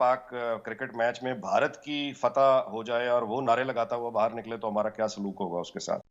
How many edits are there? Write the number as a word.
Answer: zero